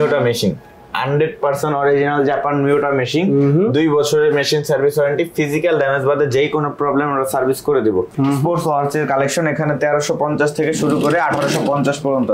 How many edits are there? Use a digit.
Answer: 1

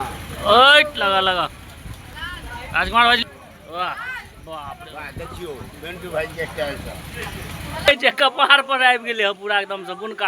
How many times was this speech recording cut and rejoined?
2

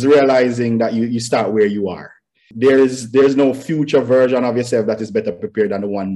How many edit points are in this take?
1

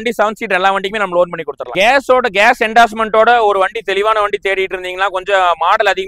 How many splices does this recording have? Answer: 1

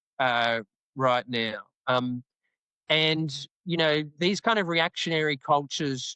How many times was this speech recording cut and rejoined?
0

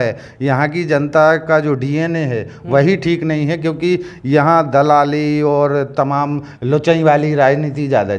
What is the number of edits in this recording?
0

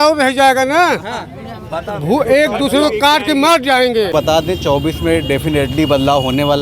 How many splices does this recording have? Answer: 1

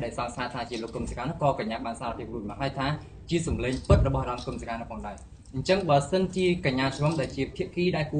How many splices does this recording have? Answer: 1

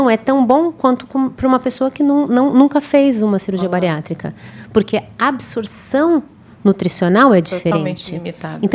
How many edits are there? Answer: 0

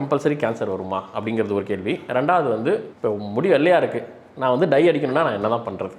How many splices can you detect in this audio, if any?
0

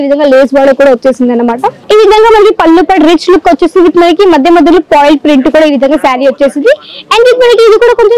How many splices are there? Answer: 1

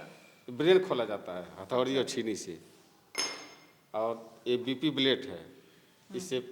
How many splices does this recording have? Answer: 0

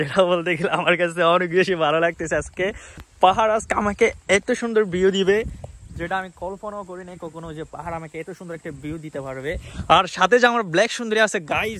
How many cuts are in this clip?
1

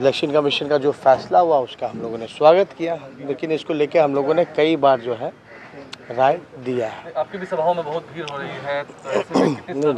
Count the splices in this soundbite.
0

